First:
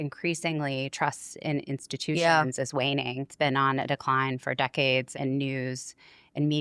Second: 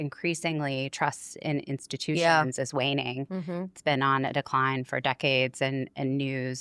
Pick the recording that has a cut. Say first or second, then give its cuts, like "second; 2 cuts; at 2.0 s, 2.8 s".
first; 2 cuts; at 3.3 s, 5.1 s